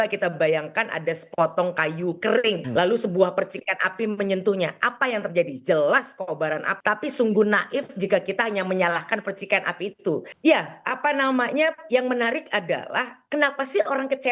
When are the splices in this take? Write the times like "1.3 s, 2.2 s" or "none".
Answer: 2.6 s, 6.7 s, 10.3 s